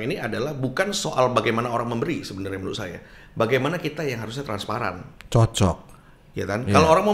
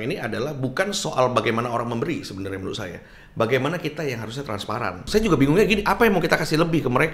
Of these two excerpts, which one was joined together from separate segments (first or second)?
second